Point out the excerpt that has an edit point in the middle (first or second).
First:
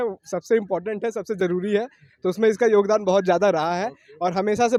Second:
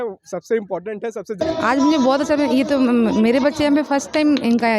second